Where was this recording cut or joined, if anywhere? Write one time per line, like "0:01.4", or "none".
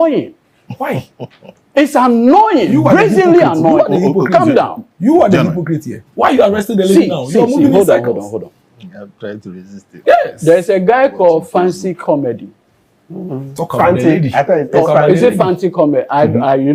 none